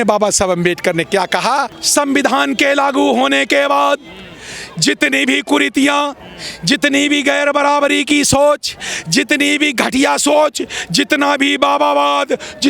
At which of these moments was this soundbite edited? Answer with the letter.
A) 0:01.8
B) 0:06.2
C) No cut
A